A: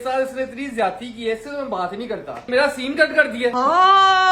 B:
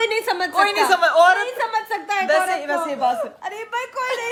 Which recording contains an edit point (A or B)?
A